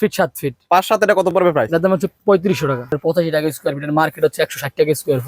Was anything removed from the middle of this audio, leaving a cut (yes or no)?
yes